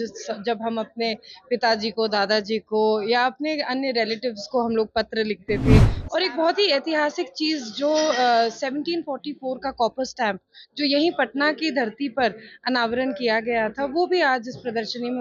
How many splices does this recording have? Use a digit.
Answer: 1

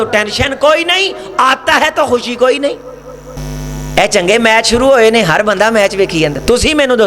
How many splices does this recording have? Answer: 1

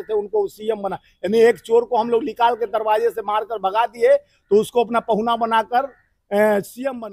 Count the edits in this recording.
0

